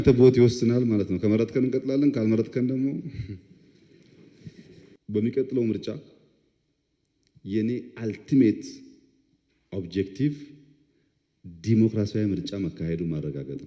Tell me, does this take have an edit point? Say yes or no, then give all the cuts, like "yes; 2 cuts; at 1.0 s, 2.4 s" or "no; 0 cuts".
yes; 1 cut; at 5.0 s